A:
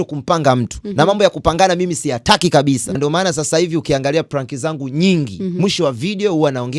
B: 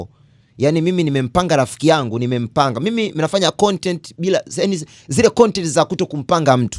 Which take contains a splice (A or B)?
A